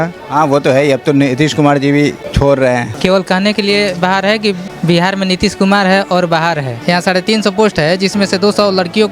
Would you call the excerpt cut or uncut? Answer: cut